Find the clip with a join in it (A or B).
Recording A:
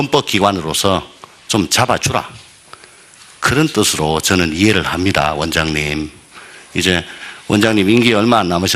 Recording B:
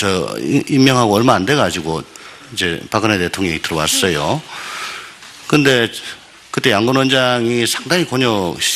B